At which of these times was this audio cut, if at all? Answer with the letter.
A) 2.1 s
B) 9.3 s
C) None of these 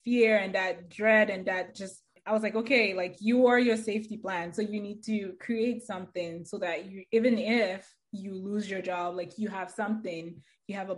A